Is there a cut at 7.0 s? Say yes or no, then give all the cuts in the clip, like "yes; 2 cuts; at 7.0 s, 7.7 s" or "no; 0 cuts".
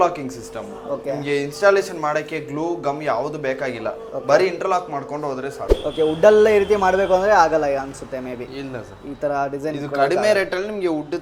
no; 1 cut; at 5.7 s